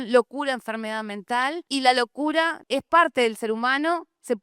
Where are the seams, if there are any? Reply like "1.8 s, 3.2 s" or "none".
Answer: 1.6 s, 2.6 s

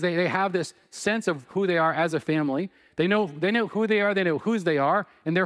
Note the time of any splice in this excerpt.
none

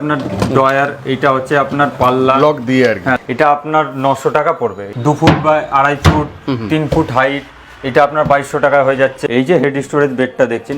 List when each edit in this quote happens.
3.2 s, 4.9 s, 9.2 s

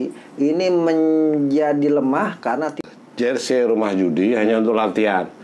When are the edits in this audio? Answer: 2.8 s

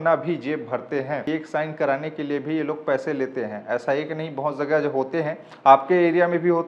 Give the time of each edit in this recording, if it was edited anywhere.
1.2 s

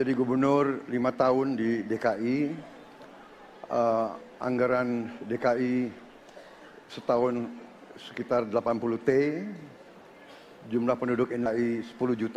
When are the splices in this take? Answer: 11.5 s

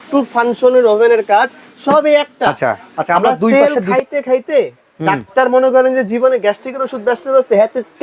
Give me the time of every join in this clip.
3.5 s

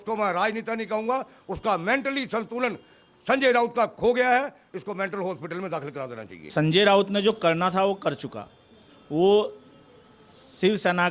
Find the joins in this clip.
6.5 s

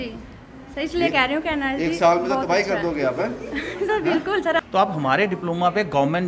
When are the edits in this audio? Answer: 4.6 s

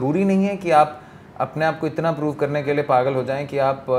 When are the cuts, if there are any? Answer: none

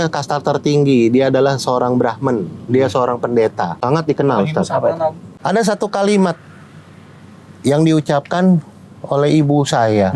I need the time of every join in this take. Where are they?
3.7 s, 5.3 s

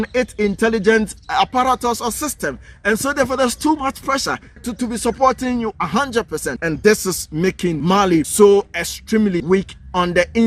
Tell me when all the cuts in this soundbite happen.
4.7 s, 6.5 s, 8.1 s, 9.4 s

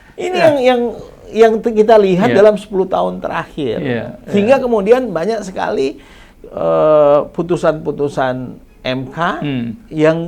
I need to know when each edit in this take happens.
none

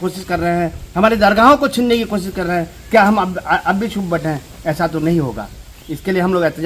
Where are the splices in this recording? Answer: none

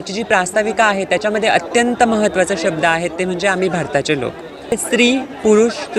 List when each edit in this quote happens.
4.8 s

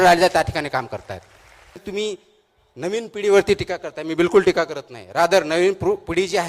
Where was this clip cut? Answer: 1.8 s

